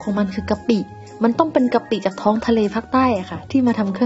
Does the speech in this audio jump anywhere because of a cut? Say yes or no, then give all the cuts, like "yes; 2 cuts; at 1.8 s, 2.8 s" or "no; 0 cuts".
no; 0 cuts